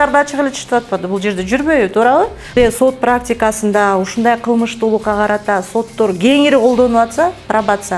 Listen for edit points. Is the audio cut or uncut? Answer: cut